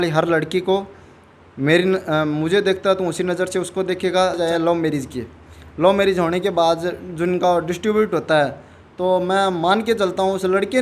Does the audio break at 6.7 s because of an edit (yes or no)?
no